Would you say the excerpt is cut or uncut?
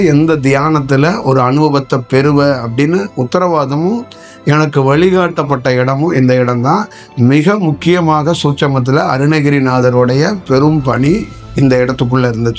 uncut